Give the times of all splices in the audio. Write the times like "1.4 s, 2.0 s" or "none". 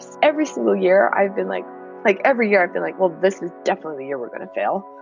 1.8 s